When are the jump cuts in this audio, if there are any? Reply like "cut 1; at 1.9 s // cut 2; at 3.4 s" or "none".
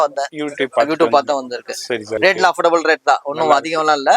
cut 1; at 2.2 s